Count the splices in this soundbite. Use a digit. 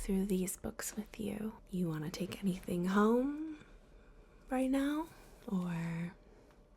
1